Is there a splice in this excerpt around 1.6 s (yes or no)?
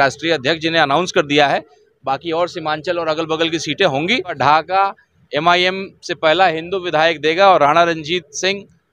no